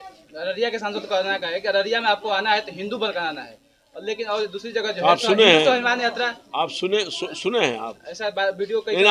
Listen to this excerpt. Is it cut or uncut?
uncut